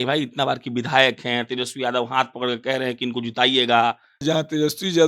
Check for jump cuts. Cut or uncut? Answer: cut